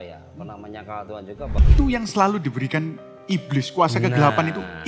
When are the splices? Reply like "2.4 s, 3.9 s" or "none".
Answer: 1.6 s